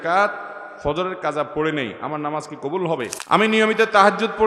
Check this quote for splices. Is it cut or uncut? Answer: cut